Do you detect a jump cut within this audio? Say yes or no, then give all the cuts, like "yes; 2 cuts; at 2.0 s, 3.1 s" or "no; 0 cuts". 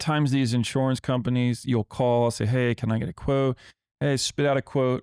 no; 0 cuts